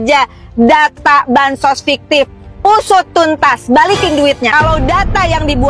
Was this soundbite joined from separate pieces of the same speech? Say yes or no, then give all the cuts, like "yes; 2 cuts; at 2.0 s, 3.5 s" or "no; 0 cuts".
yes; 1 cut; at 4.5 s